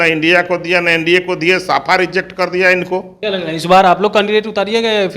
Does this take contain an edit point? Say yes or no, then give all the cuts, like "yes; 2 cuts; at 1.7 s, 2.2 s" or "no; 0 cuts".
yes; 1 cut; at 3.1 s